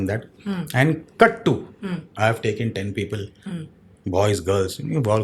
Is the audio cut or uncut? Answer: cut